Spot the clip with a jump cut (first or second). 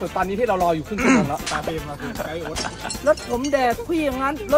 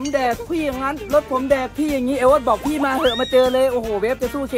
first